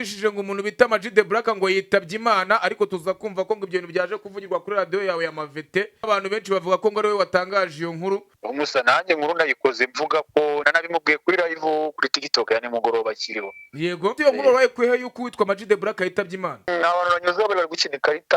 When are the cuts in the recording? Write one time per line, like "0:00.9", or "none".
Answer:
0:06.1
0:08.3
0:10.7
0:14.2
0:16.7